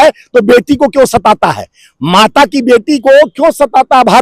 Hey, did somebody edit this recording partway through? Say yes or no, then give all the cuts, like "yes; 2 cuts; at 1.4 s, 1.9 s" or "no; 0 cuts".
no; 0 cuts